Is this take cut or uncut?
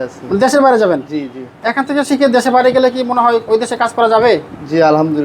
uncut